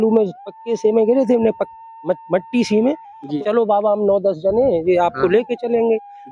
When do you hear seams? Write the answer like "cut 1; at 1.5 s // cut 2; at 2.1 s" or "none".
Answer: cut 1; at 3.3 s